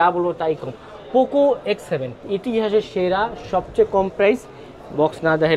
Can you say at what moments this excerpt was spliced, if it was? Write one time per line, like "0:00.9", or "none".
0:02.2